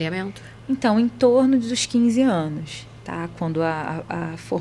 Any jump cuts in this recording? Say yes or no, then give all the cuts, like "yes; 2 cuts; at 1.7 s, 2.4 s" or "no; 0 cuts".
no; 0 cuts